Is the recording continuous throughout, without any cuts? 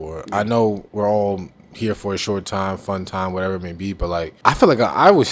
no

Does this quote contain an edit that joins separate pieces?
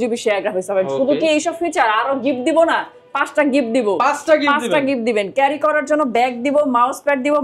no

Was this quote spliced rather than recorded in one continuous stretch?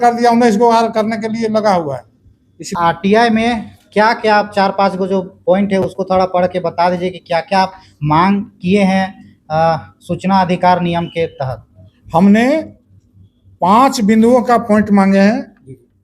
yes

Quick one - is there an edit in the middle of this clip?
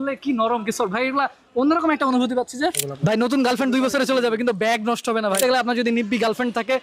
yes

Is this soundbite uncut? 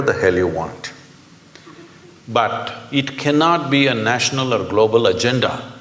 yes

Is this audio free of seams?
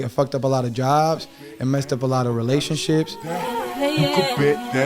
no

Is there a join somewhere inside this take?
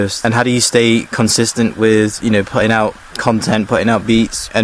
no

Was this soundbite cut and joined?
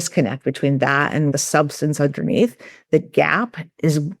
yes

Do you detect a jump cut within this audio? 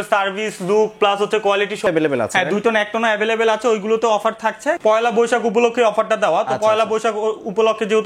yes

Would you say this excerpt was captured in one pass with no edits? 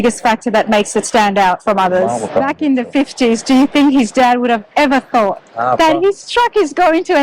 no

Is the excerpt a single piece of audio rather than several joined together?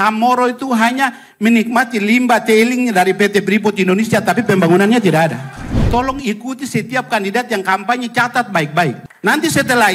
no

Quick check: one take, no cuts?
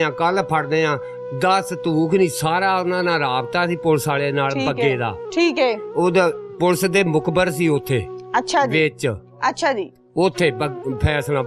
yes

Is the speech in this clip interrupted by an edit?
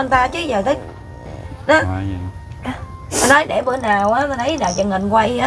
no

